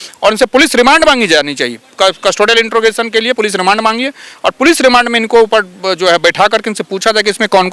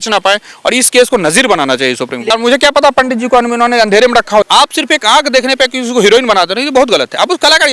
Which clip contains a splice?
second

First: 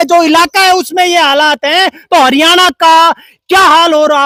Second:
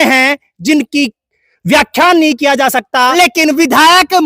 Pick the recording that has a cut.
second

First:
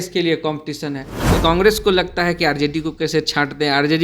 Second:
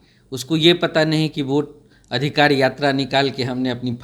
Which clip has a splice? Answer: first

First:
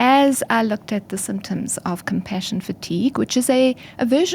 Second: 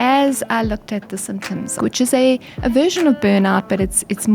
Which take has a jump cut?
second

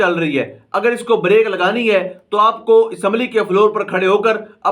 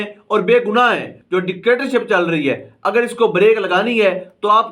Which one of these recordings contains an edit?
second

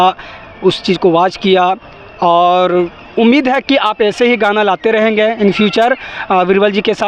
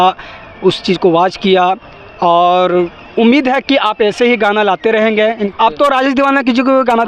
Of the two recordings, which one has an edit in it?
second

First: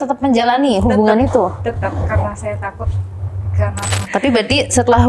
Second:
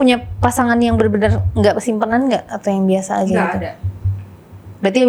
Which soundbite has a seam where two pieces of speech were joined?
first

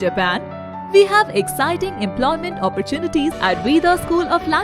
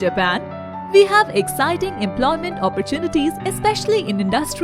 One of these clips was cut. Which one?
first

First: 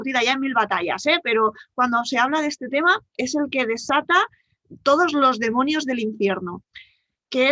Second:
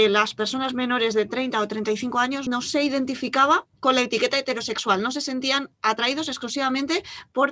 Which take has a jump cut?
second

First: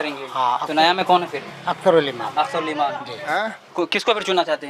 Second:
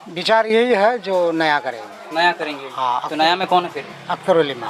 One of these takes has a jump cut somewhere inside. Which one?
first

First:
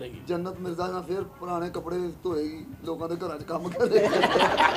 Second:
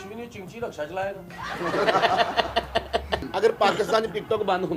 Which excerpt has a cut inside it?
second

